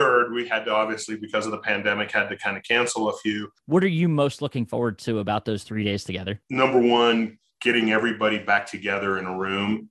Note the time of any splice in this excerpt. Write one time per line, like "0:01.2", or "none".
0:03.5
0:06.4